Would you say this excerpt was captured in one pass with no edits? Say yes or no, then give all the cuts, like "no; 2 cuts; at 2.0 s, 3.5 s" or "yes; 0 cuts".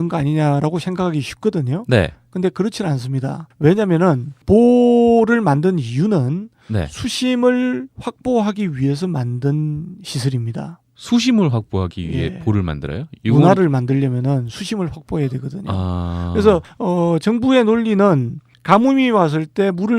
no; 1 cut; at 19.0 s